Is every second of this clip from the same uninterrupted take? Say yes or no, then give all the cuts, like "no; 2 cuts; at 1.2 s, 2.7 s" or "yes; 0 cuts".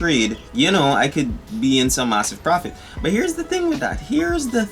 yes; 0 cuts